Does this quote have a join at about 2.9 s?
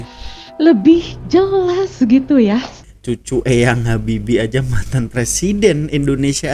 yes; 1 cut; at 2.9 s

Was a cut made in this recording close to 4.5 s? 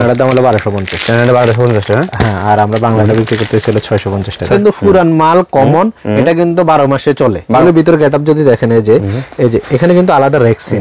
yes; 2 cuts; at 4.5 s, 7.6 s

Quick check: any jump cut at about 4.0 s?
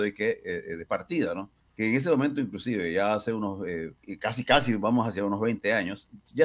yes; 2 cuts; at 1.6 s, 4.0 s

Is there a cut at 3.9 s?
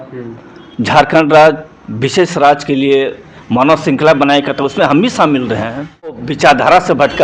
no; 1 cut; at 6.3 s

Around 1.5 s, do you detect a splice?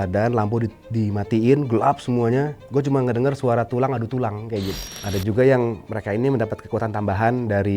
no; 1 cut; at 4.8 s

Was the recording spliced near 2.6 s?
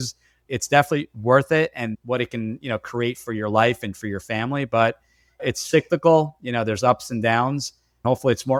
no; 0 cuts

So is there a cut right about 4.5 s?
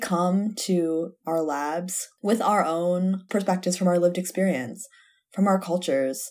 no; 2 cuts; at 2.0 s, 3.2 s

